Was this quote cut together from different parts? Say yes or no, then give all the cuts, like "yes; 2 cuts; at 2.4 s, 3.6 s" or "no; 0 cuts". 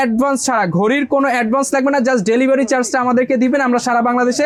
no; 0 cuts